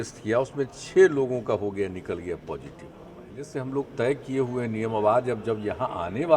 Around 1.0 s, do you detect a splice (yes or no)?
no